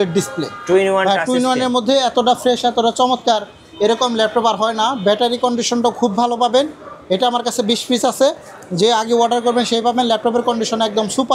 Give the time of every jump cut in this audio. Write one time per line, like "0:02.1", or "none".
none